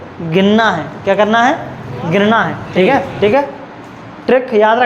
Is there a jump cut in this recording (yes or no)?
yes